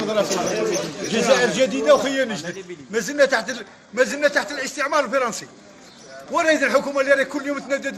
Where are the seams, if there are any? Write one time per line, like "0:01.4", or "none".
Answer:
0:02.0

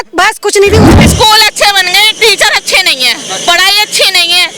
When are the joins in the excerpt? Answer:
0:00.9

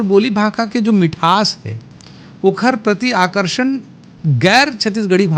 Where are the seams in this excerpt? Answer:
none

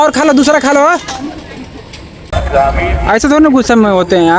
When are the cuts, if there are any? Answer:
0:02.3

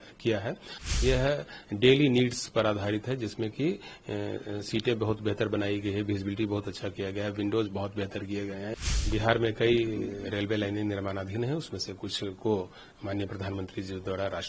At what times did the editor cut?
0:00.8
0:09.0

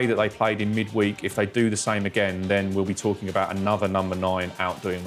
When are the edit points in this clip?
none

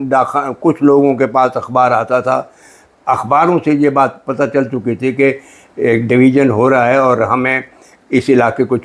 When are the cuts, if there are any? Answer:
none

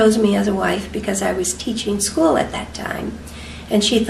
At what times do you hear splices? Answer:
0:01.6

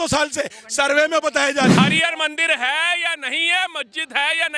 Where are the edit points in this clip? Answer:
0:01.7

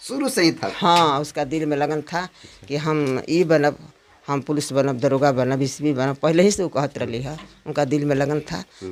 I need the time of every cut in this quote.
none

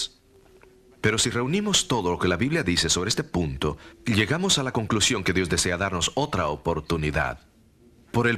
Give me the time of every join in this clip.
0:02.4

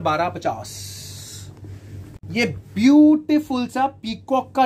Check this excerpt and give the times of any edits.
0:02.2

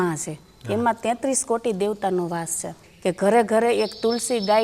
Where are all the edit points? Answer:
0:02.8

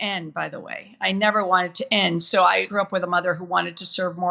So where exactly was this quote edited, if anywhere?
0:02.7

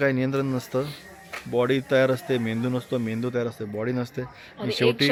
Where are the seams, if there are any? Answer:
none

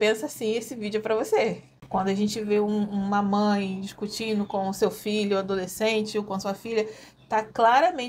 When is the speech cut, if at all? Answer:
0:01.7

